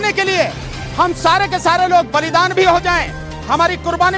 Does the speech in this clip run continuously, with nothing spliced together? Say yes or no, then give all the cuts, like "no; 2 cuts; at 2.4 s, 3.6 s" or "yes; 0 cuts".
yes; 0 cuts